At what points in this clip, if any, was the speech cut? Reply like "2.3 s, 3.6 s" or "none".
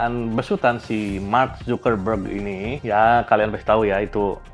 2.8 s